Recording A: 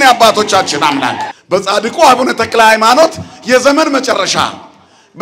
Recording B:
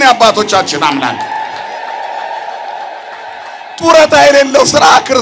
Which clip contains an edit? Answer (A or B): A